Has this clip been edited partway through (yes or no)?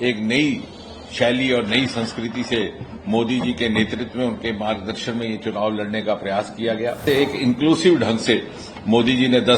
yes